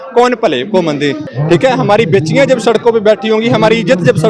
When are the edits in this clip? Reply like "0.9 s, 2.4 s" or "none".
1.2 s

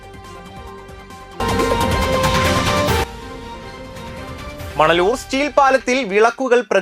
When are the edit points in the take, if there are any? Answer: none

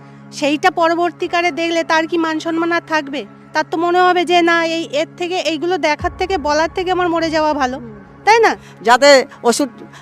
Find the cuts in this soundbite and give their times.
8.7 s

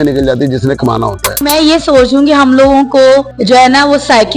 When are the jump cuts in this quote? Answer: 1.4 s, 3.3 s

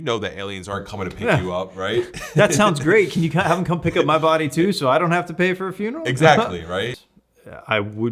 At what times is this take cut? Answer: 6.9 s

